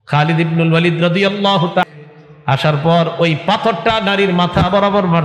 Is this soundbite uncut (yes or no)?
no